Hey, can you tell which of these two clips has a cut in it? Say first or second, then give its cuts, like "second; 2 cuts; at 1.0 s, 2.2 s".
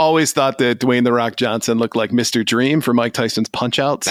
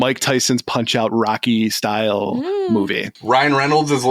second; 1 cut; at 3.1 s